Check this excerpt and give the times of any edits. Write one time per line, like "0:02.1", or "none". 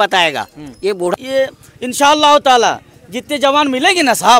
0:01.1